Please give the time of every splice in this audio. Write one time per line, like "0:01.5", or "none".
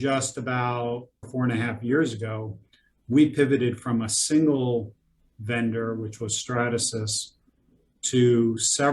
0:01.3